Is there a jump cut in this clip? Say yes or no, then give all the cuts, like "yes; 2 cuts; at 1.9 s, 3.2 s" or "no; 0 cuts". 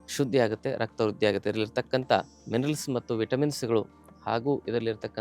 yes; 1 cut; at 2.4 s